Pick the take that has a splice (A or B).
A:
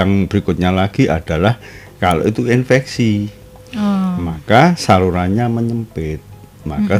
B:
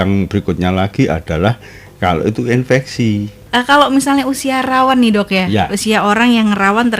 B